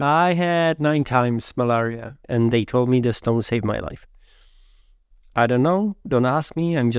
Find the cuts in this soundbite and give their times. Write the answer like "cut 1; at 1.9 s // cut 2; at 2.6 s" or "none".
cut 1; at 2.2 s